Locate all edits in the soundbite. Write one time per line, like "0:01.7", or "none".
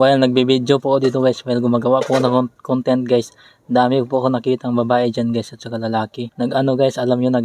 0:06.2